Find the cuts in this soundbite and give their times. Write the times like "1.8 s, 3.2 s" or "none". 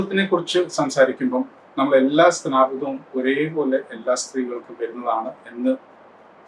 none